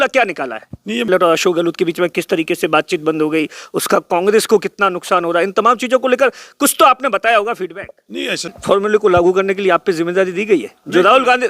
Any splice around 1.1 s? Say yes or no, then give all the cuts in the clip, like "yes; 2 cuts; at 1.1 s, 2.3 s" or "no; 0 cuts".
yes; 2 cuts; at 1.1 s, 8.5 s